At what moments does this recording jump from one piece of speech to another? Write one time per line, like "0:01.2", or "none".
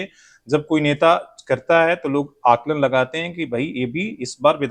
none